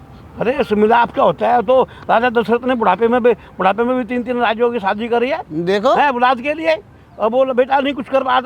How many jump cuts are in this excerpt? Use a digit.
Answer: 0